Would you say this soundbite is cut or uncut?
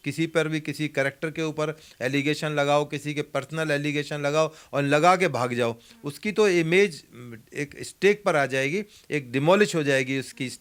uncut